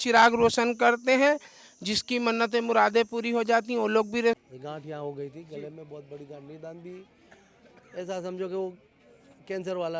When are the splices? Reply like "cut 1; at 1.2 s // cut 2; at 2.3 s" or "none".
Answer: cut 1; at 4.4 s